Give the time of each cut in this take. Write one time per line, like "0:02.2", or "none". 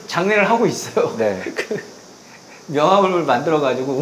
none